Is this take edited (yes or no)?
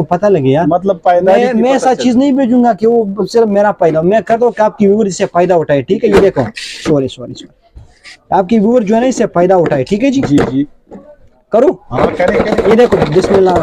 no